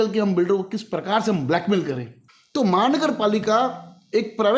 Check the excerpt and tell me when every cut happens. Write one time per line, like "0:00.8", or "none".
0:02.1